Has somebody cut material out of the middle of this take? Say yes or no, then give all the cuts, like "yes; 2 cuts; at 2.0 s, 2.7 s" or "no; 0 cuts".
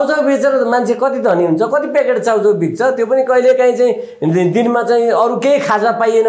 no; 0 cuts